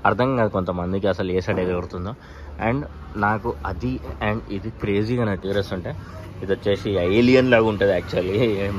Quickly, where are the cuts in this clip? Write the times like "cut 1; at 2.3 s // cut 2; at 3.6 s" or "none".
cut 1; at 5.4 s